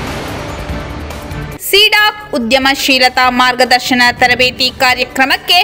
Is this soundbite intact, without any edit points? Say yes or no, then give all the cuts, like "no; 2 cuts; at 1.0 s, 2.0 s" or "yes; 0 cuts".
no; 1 cut; at 1.0 s